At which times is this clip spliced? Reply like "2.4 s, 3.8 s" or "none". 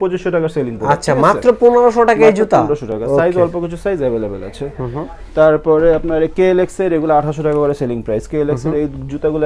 none